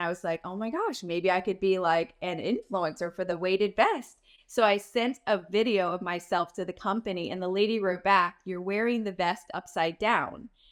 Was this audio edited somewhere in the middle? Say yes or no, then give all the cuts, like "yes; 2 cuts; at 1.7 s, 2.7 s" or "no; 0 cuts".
no; 0 cuts